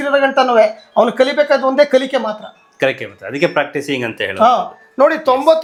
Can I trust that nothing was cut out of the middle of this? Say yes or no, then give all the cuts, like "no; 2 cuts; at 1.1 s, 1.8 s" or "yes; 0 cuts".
yes; 0 cuts